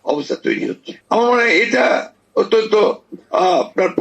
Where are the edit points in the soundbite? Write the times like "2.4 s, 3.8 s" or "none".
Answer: 0.9 s